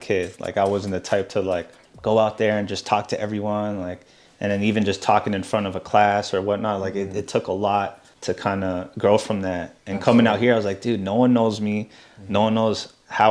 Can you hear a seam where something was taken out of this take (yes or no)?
no